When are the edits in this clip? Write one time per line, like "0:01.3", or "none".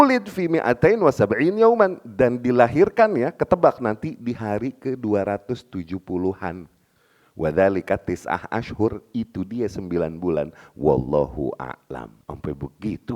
0:12.1

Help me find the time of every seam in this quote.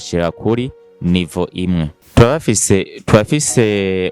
0:02.0

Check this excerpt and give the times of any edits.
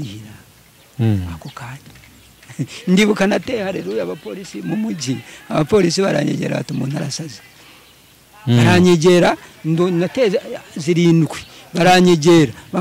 none

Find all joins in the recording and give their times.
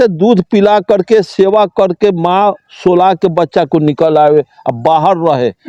none

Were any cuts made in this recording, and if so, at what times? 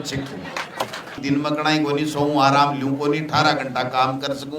0:01.2

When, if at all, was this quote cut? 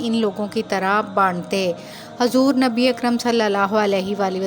0:01.9

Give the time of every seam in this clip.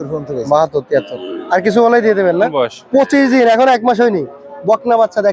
0:02.5

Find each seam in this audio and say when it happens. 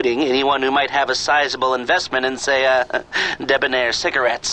none

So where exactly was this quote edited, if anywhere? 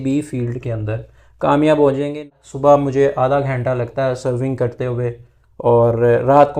0:02.2

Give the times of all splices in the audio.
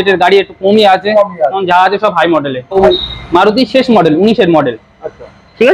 0:02.7

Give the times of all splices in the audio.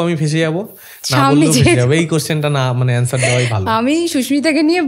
none

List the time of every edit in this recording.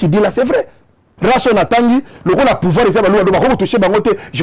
0:01.1

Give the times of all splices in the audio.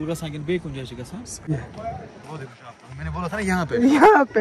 0:01.5

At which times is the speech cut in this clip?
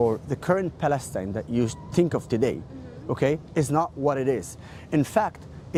none

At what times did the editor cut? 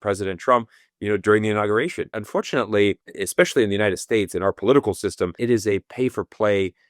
0:02.2
0:03.1
0:05.4

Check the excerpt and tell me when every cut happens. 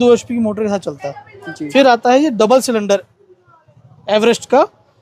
none

